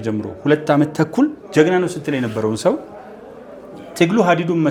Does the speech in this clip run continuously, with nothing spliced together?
yes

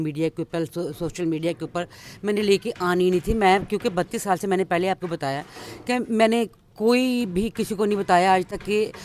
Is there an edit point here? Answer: no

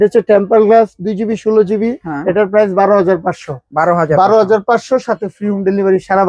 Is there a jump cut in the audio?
no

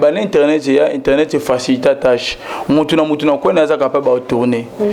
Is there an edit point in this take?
no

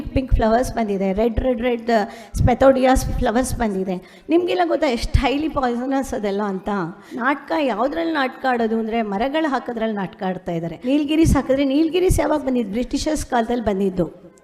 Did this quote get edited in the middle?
yes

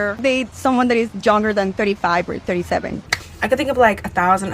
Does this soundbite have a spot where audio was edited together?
yes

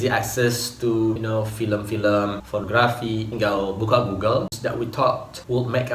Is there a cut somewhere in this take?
yes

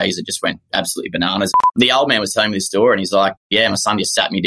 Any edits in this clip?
yes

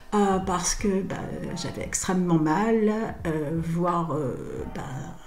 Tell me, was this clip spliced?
no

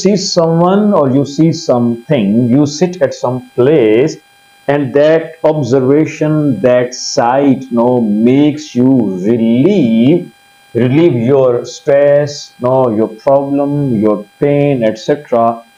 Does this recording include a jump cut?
no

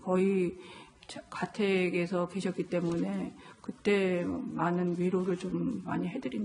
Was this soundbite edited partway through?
no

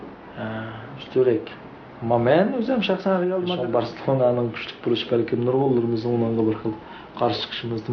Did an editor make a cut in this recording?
yes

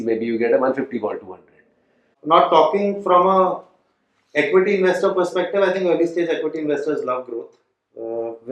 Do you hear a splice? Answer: yes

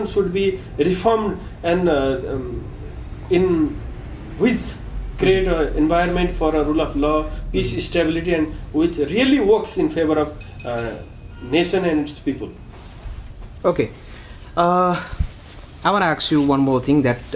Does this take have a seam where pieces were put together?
no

